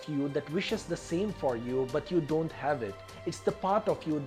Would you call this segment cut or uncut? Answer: uncut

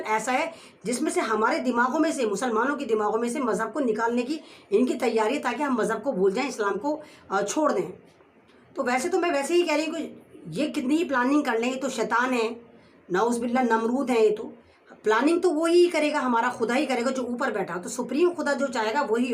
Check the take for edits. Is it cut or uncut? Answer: uncut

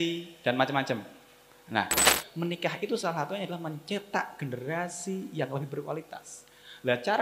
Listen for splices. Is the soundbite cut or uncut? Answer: cut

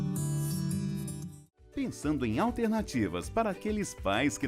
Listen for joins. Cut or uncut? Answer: cut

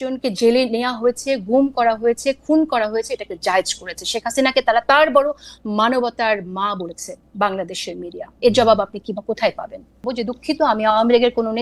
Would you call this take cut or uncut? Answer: cut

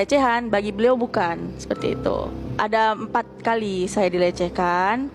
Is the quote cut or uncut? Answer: uncut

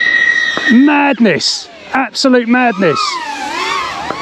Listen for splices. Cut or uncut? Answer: uncut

